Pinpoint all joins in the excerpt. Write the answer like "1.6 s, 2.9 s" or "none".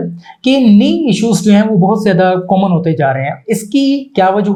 none